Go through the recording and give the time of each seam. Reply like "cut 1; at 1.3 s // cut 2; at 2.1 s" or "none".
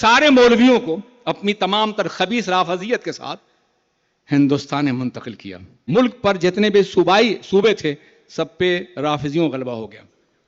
cut 1; at 5.8 s